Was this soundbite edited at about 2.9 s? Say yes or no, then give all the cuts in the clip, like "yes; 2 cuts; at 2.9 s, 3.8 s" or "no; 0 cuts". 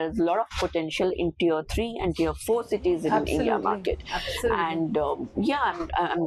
no; 0 cuts